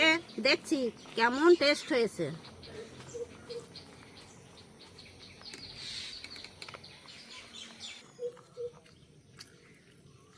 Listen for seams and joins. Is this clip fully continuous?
no; 1 cut; at 8.1 s

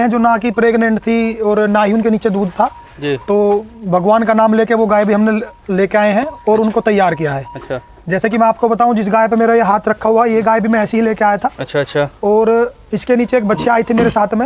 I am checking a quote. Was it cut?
no; 0 cuts

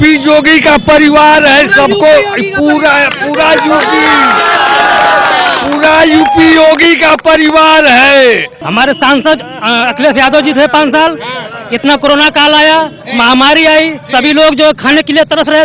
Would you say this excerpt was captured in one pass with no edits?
no; 1 cut; at 8.6 s

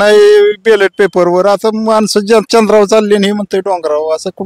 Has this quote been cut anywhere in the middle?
no; 0 cuts

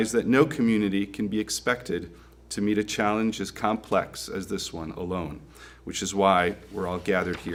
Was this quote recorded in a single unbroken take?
yes; 0 cuts

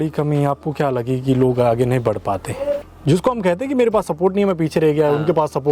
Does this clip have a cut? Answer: yes; 1 cut; at 2.9 s

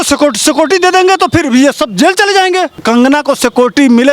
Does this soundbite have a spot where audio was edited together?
yes; 1 cut; at 2.8 s

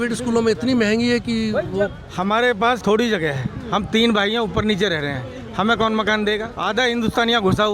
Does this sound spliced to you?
yes; 3 cuts; at 2.0 s, 2.8 s, 6.5 s

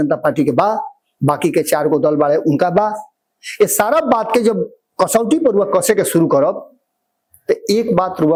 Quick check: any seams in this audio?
no; 0 cuts

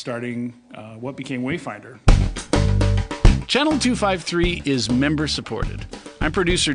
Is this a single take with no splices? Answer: no; 1 cut; at 2.0 s

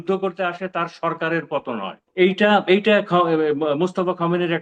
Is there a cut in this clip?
yes; 1 cut; at 2.1 s

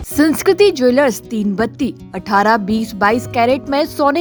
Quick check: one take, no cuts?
yes; 0 cuts

